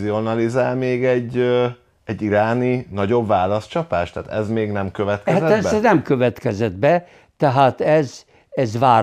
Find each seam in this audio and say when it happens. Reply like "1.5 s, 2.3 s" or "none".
none